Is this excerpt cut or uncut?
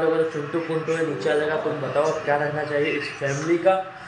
uncut